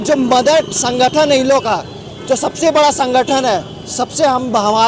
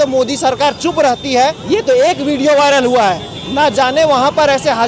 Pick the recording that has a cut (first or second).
second